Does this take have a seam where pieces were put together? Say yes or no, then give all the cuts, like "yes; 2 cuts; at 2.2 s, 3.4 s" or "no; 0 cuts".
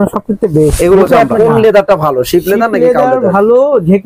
yes; 1 cut; at 1.3 s